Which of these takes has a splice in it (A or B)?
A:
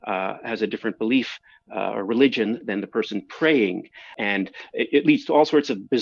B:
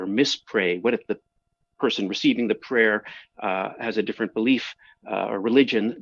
A